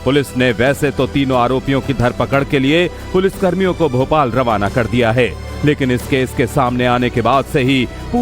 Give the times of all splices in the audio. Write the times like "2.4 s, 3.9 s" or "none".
6.7 s